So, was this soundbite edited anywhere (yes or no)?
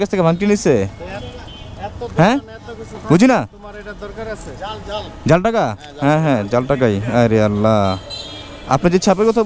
no